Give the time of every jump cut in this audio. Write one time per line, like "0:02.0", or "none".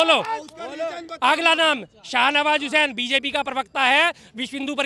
none